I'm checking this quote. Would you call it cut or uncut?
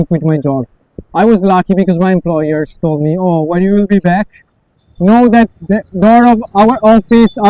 uncut